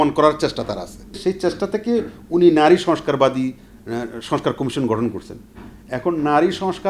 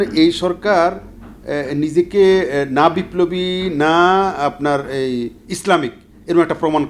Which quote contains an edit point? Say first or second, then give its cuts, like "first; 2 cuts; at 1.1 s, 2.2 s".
first; 1 cut; at 1.2 s